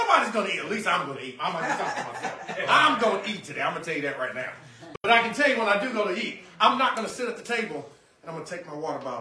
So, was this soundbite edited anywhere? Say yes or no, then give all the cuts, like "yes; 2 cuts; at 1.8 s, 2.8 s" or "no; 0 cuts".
no; 0 cuts